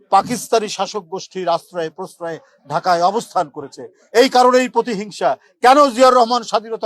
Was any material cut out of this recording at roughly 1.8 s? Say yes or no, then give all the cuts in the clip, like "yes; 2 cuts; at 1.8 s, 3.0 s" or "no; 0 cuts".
no; 0 cuts